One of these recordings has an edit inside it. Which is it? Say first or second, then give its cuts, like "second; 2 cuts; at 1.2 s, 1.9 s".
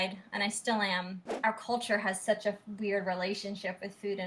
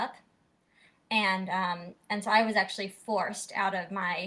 first; 1 cut; at 1.2 s